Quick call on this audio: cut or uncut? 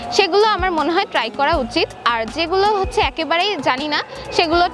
uncut